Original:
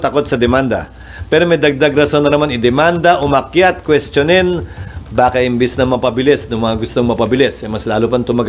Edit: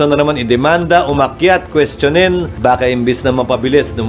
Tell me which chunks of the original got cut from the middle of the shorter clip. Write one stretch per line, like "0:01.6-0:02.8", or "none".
0:04.6-0:05.0